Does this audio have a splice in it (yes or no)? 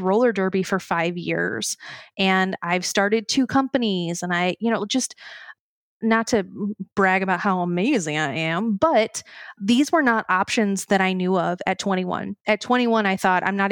no